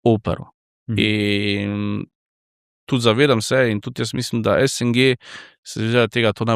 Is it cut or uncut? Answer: uncut